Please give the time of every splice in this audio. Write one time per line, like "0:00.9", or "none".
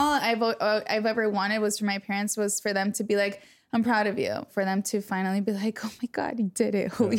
0:04.5